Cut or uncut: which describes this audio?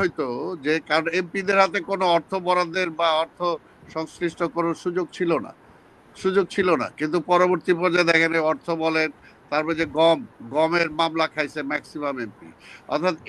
uncut